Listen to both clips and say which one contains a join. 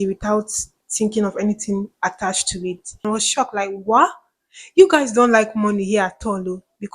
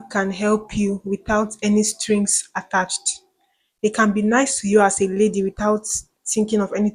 first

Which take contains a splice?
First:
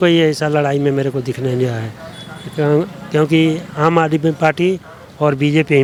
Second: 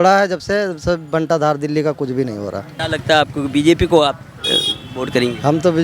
second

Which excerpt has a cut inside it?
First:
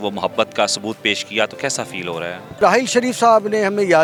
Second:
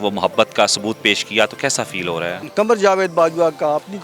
second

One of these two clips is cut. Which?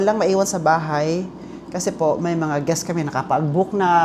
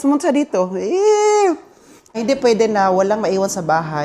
second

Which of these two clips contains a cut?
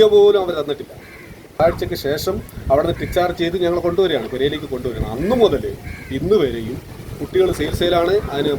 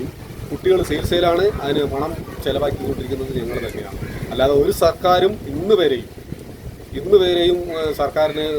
first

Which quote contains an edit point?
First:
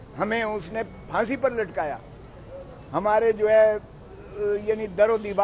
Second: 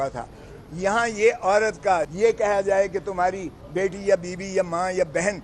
second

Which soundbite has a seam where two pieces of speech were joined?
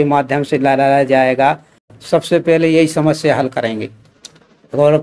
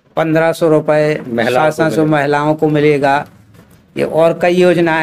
first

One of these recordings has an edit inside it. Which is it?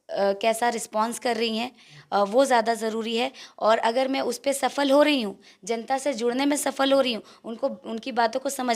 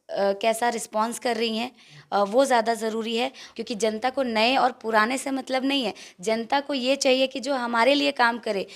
second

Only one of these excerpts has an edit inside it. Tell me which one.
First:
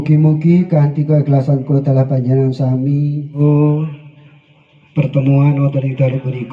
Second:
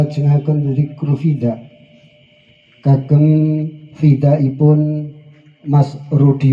first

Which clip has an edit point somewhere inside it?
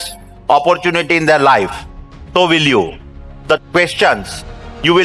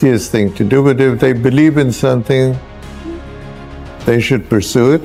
first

